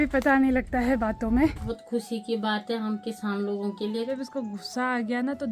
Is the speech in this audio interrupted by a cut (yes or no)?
yes